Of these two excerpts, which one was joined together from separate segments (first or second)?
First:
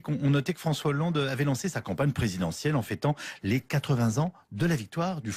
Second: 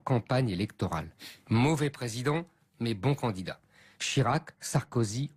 second